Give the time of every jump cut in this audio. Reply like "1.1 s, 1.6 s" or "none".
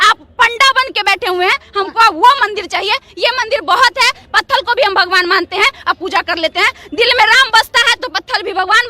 none

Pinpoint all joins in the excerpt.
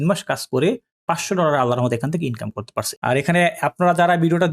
2.9 s

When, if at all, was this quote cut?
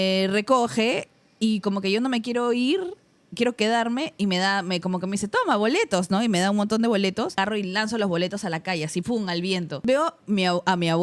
7.4 s, 9.8 s

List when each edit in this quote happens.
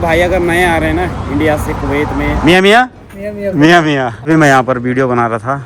2.4 s, 4.2 s

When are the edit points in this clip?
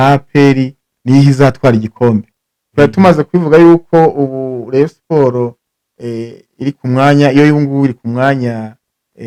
none

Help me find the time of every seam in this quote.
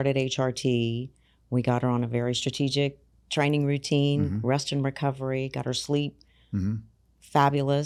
none

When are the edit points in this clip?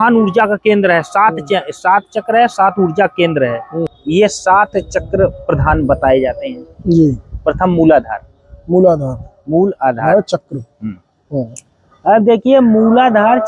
3.9 s

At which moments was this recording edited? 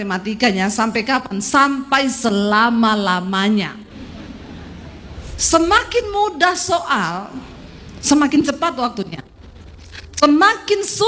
5.1 s

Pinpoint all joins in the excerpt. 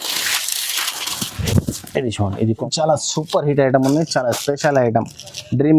2.5 s

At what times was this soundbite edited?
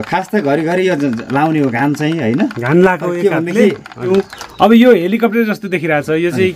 4.0 s

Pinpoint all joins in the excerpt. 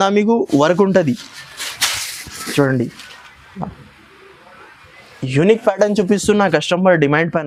none

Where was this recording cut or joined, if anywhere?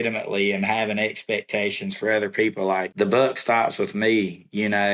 2.9 s

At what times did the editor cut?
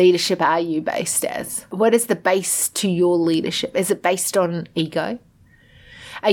1.7 s

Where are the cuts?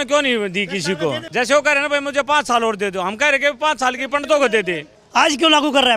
1.2 s, 4.9 s

